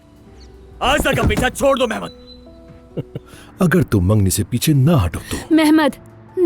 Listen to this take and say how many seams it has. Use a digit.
1